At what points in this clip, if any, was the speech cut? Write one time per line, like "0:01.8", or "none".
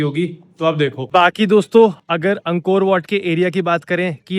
0:01.1